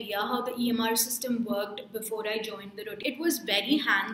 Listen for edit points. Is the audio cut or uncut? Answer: cut